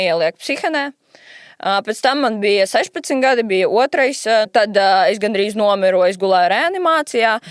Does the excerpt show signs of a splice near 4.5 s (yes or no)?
yes